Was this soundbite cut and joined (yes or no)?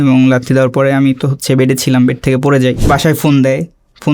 yes